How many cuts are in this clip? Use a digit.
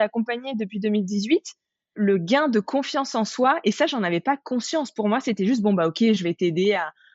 0